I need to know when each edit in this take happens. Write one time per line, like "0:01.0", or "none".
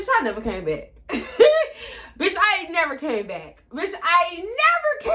none